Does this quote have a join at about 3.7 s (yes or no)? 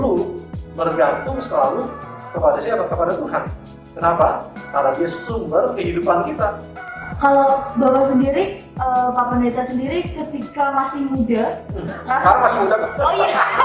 no